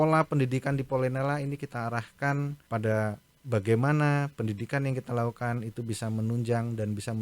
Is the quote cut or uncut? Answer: cut